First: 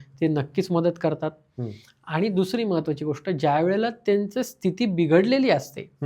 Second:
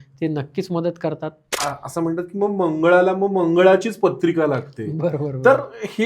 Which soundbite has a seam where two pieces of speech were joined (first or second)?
second